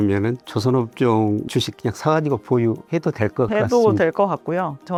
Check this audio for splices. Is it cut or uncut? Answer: uncut